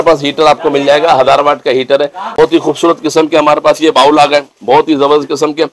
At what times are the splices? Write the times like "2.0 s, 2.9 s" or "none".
2.3 s